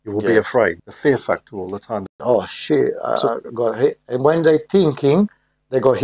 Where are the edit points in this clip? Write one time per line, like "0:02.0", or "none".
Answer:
0:02.2